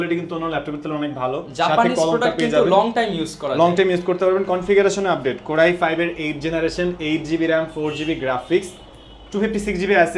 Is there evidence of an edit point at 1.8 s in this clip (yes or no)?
no